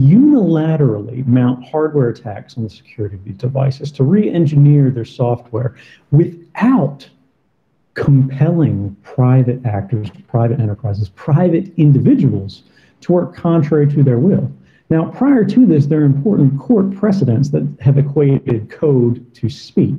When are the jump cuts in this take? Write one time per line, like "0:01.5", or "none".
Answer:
none